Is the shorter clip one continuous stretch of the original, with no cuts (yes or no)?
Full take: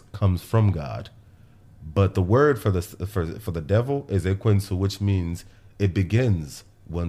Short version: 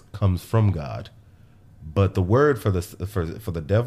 yes